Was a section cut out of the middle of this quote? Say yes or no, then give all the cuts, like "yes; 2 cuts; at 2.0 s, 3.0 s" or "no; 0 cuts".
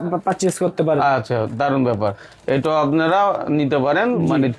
no; 0 cuts